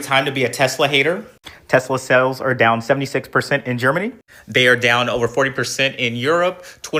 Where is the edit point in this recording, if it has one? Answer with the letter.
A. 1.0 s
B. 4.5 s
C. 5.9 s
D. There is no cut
D